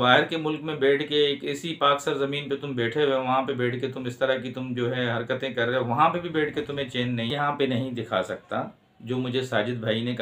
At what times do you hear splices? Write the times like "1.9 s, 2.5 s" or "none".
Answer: 7.3 s